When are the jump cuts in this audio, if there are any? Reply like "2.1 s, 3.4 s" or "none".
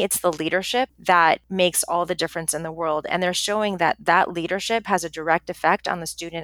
0.9 s, 1.5 s